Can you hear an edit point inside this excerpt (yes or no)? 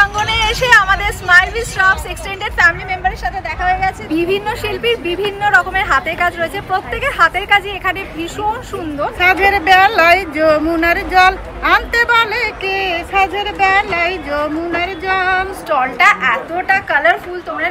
yes